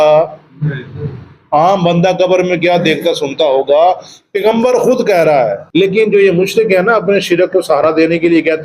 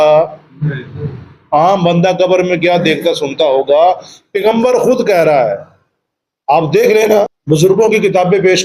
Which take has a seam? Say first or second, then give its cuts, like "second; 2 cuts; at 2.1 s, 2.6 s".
first; 1 cut; at 5.6 s